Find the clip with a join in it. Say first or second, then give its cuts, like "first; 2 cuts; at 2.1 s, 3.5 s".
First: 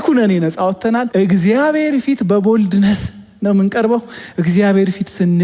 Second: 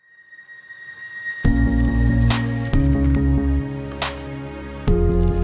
first; 1 cut; at 1.1 s